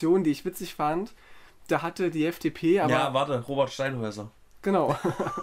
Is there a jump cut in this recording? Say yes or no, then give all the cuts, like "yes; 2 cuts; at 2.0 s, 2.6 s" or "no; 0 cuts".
no; 0 cuts